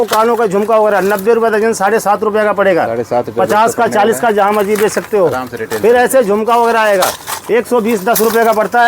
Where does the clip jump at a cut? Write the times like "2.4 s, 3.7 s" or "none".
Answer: none